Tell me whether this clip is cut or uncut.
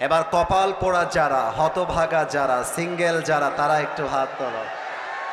uncut